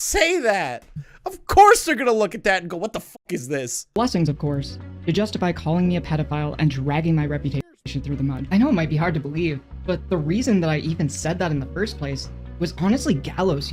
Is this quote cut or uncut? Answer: uncut